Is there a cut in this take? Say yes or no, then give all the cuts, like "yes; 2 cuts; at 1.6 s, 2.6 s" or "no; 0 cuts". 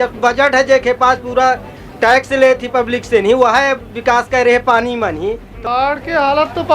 yes; 1 cut; at 5.5 s